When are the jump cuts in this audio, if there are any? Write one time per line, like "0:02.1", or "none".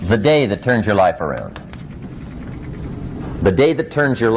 none